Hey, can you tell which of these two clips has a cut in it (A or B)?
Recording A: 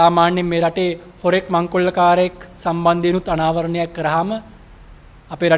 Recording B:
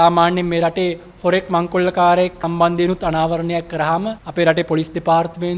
B